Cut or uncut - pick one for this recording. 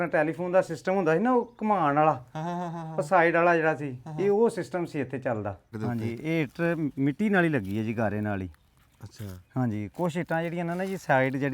cut